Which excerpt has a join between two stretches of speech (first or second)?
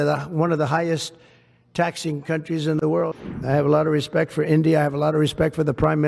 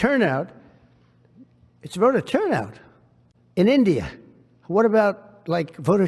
first